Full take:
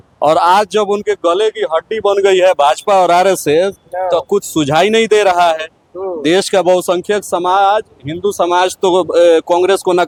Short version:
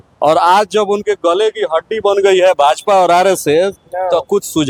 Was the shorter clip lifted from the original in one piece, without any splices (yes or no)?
yes